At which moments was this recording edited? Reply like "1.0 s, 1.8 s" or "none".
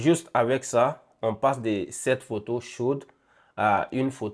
none